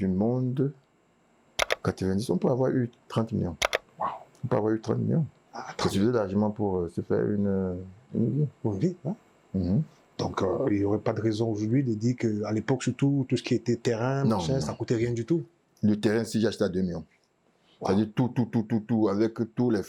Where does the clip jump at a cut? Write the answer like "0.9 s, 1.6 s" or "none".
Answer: none